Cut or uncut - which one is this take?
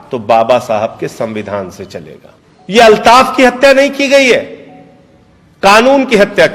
uncut